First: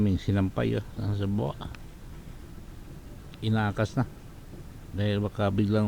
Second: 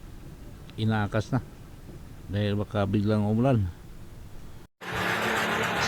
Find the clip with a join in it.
second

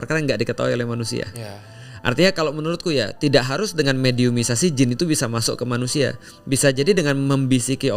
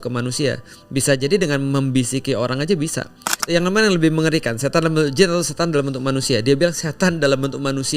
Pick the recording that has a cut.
second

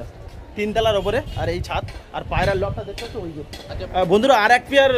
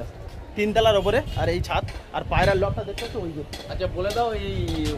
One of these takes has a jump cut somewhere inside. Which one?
first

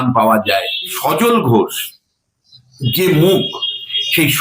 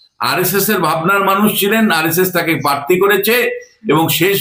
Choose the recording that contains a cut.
first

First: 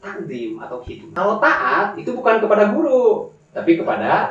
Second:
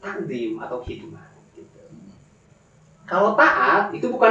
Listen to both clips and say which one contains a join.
first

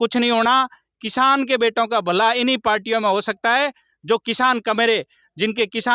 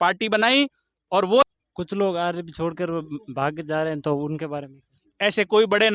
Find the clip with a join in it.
second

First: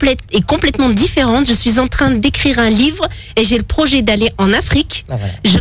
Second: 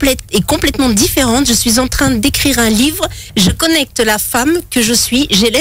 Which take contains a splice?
second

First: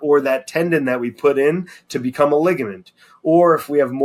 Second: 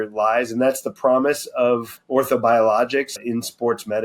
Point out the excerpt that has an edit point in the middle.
second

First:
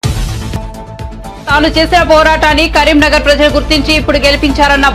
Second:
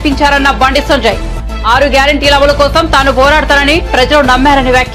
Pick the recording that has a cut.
first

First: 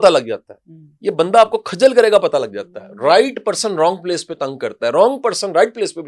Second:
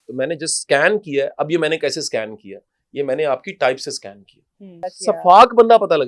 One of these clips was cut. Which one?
second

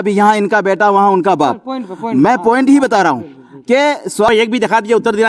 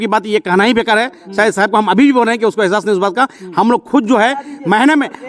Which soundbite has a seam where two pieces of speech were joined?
first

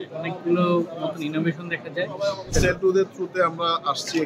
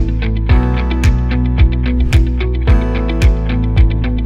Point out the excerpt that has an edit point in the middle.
first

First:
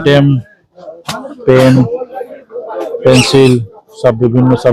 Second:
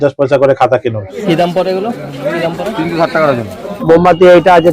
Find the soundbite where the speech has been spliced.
second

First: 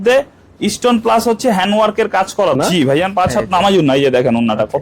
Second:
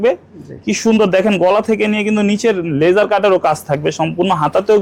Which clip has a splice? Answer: first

